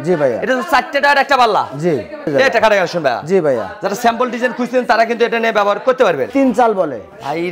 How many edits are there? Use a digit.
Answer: 2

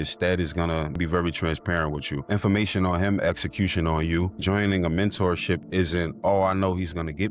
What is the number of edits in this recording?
3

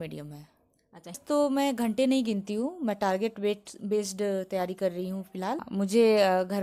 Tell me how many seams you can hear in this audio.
2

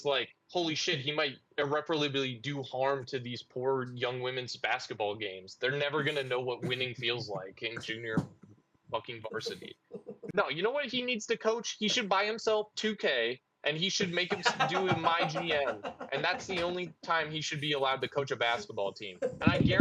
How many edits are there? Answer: 1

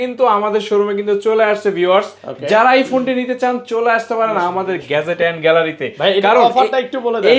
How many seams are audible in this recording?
0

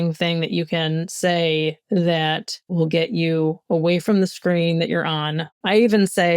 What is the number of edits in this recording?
2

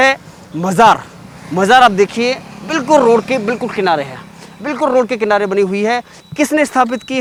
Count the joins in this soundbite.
0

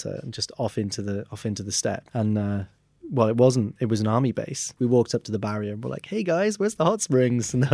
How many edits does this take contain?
2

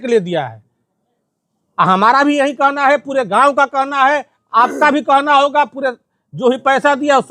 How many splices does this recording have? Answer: 0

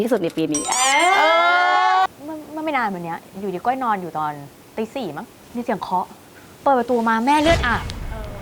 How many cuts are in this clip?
2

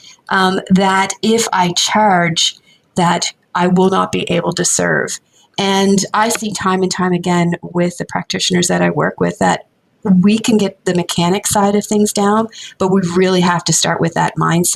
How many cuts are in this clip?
0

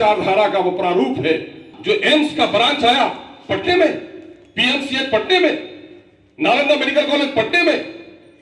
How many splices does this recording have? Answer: 1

